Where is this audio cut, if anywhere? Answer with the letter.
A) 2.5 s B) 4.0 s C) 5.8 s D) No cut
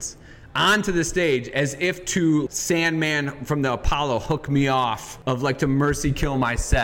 A